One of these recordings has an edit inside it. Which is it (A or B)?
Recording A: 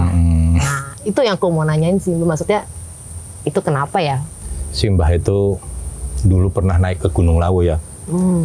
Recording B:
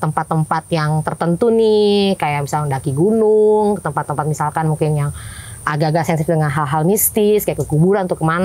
A